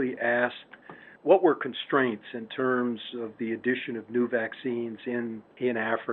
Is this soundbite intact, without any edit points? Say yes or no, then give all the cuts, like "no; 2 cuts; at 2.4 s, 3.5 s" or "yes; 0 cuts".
yes; 0 cuts